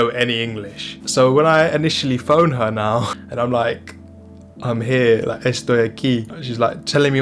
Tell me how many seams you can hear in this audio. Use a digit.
1